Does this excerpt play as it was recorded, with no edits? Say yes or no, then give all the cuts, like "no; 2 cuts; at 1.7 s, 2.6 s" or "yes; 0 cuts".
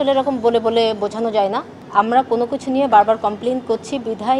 no; 1 cut; at 1.7 s